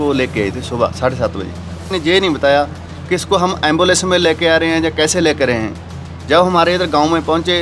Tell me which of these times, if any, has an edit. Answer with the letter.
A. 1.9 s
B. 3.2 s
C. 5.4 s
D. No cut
A